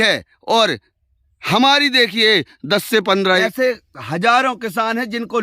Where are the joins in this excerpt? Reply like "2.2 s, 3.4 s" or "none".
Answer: 3.4 s